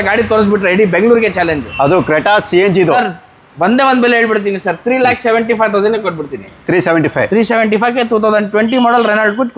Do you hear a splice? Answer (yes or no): yes